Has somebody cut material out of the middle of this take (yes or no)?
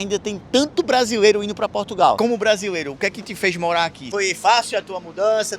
yes